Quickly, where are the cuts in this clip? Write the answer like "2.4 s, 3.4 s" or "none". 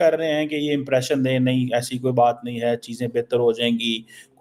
none